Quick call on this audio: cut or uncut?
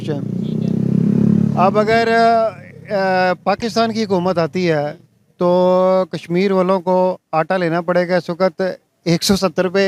uncut